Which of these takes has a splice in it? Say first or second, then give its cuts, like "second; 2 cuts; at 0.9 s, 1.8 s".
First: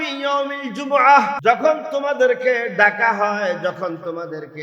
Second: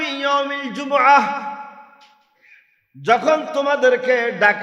first; 1 cut; at 1.4 s